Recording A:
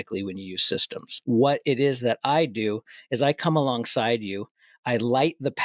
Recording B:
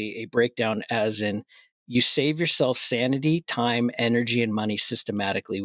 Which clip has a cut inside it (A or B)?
A